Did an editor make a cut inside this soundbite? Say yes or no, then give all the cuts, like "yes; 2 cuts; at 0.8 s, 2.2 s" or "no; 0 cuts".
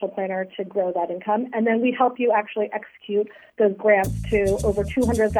no; 0 cuts